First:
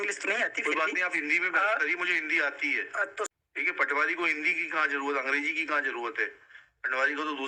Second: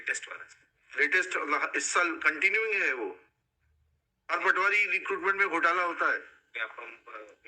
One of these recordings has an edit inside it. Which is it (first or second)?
first